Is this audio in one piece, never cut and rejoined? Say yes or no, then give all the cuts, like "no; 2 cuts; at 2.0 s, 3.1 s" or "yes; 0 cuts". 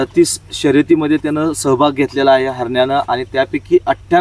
yes; 0 cuts